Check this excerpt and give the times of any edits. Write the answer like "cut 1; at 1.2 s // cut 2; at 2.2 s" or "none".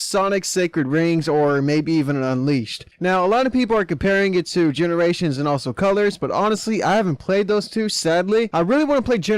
cut 1; at 5.7 s